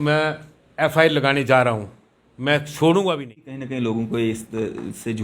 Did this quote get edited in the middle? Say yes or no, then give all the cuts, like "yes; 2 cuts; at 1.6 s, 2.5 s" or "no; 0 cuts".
yes; 1 cut; at 3.6 s